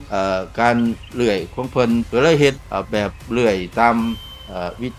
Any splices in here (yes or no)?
no